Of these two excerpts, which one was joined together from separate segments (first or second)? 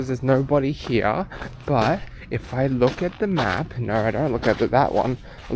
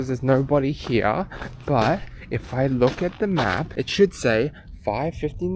second